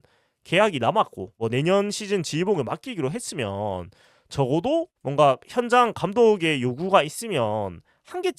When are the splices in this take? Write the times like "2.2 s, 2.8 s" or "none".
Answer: none